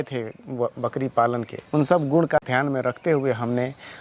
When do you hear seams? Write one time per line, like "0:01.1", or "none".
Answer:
0:02.4